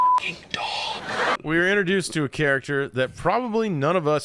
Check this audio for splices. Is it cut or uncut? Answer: cut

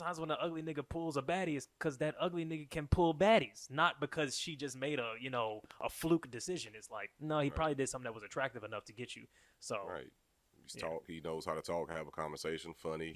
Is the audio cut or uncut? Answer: uncut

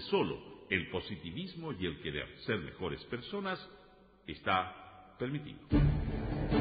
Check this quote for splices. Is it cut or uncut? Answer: cut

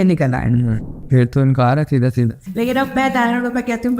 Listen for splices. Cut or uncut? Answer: cut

